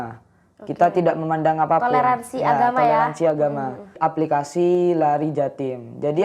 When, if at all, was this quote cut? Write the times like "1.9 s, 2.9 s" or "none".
3.9 s